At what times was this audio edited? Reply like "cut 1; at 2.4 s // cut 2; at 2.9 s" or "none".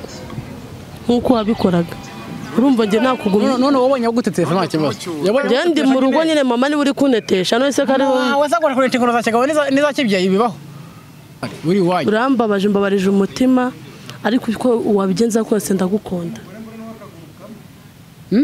cut 1; at 11.5 s